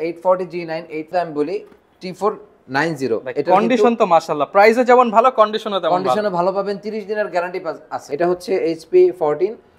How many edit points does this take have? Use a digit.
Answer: 2